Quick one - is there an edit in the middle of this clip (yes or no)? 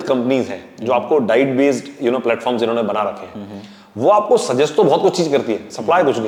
no